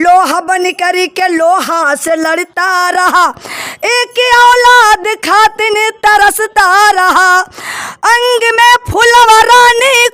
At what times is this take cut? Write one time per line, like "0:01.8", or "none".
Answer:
none